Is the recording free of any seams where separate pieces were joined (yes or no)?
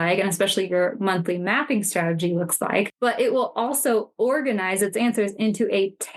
no